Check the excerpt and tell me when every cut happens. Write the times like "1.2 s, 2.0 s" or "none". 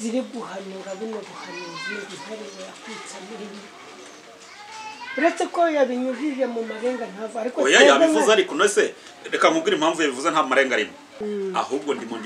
11.0 s